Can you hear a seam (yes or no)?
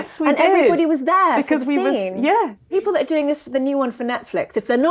yes